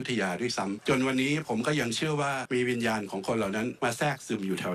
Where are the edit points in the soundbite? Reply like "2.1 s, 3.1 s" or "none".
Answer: 0.8 s, 2.4 s, 3.7 s